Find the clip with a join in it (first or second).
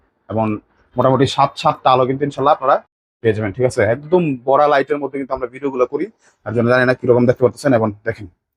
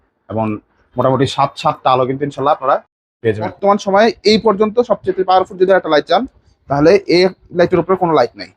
second